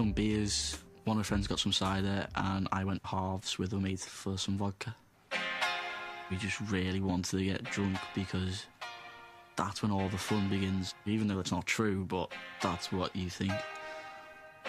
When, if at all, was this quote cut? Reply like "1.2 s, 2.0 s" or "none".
6.1 s